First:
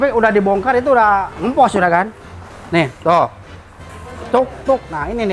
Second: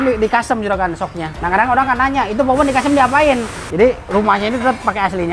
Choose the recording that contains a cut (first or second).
second